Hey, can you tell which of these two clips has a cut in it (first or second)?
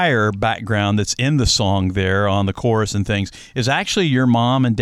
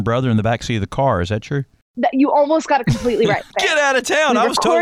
second